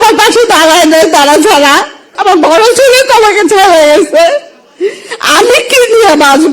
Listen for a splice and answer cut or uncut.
cut